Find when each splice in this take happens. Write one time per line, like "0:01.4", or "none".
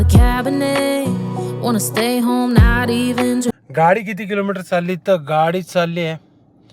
0:03.5

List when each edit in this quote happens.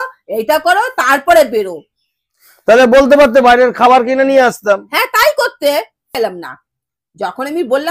0:06.2

